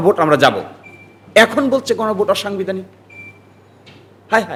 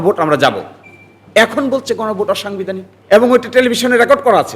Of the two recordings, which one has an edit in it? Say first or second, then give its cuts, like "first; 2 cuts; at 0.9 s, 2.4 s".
second; 1 cut; at 2.9 s